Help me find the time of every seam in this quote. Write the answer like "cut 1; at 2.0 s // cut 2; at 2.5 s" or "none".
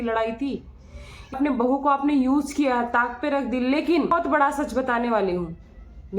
cut 1; at 1.3 s // cut 2; at 4.1 s